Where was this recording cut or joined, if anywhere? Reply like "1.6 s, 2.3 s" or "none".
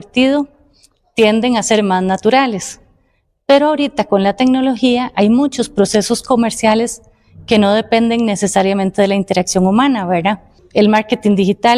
10.6 s